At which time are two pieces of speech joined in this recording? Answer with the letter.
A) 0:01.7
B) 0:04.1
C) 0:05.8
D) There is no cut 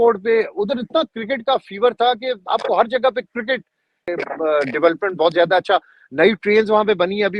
B